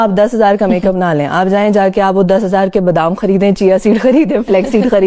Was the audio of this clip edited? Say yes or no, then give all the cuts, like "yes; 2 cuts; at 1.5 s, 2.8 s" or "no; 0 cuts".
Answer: no; 0 cuts